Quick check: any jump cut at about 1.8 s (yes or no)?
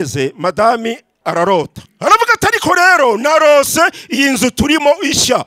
yes